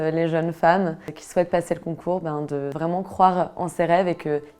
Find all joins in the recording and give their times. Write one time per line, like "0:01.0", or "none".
0:01.0
0:02.7